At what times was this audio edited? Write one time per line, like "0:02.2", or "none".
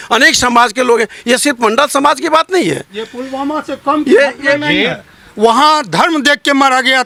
none